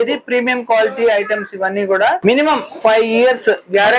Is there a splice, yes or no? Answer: yes